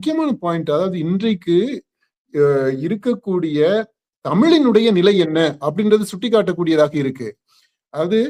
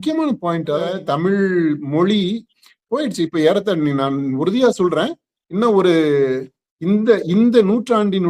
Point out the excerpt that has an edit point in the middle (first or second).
second